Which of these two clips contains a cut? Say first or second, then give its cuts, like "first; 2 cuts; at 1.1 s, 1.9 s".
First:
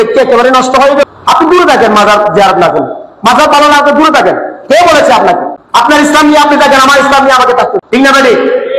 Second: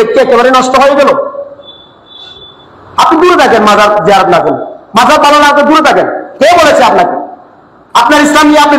first; 3 cuts; at 1.0 s, 5.6 s, 7.8 s